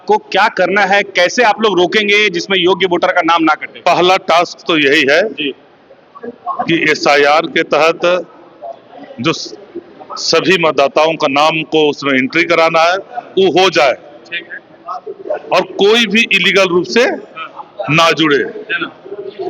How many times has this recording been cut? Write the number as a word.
zero